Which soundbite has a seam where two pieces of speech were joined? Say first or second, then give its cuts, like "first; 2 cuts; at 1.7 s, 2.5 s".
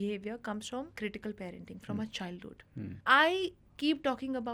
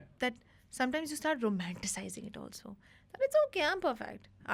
first; 2 cuts; at 0.9 s, 3.0 s